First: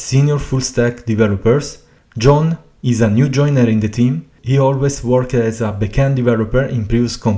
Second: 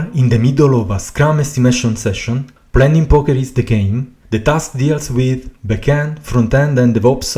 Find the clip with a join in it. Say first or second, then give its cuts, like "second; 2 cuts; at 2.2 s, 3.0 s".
second; 1 cut; at 4.1 s